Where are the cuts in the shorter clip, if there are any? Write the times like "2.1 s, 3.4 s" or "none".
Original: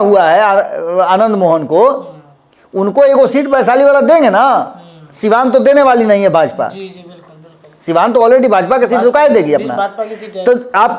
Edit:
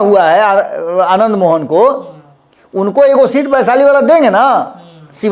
none